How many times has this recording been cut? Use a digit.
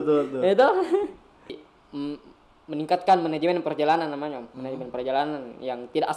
1